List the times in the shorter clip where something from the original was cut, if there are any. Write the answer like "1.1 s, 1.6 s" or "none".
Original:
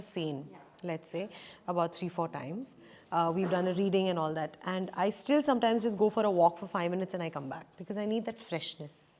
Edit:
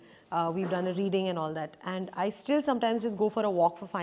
none